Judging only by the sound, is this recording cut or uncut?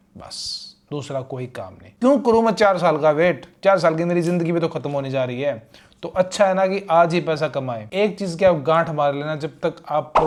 uncut